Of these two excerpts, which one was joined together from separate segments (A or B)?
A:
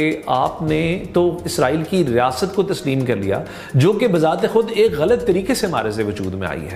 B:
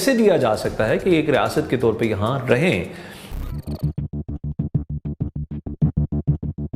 B